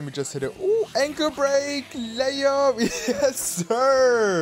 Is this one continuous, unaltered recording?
yes; 0 cuts

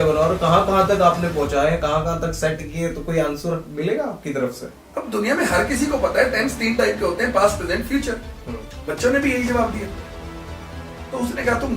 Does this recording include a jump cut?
yes; 1 cut; at 4.7 s

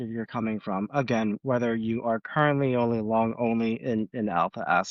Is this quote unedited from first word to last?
yes; 0 cuts

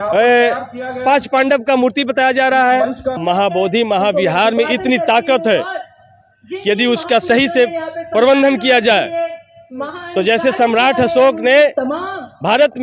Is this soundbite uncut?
no; 1 cut; at 3.2 s

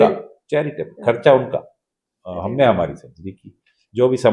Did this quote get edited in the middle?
no; 0 cuts

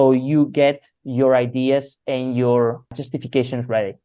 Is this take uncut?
no; 2 cuts; at 0.9 s, 2.9 s

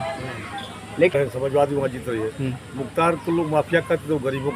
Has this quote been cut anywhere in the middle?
yes; 1 cut; at 1.1 s

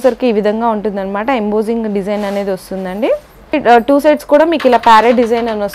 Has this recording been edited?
no; 0 cuts

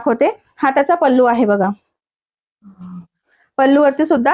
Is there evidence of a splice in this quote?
no; 0 cuts

